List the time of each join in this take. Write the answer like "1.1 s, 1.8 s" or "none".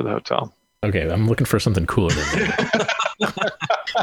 none